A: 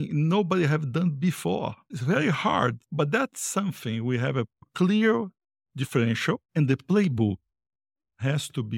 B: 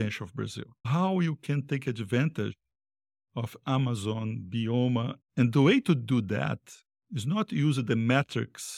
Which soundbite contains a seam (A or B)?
A